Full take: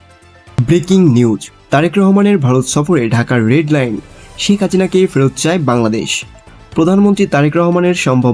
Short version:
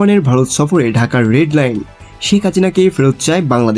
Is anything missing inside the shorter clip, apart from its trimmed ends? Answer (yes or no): no